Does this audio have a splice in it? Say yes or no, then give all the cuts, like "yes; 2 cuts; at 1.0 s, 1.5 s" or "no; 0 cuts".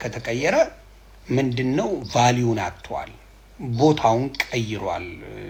no; 0 cuts